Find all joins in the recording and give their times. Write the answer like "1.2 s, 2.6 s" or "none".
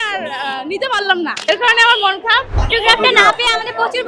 1.4 s, 2.6 s